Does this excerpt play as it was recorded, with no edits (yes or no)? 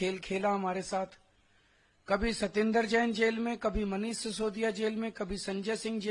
yes